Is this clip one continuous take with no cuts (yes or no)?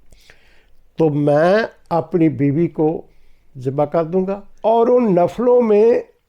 no